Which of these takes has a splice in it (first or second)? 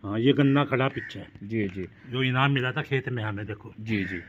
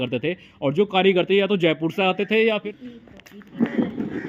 second